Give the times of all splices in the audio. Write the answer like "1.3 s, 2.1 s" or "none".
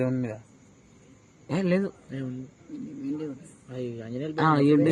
none